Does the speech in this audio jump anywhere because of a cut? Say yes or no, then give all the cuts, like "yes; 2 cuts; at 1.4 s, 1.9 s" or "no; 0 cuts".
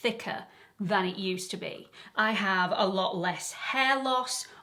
no; 0 cuts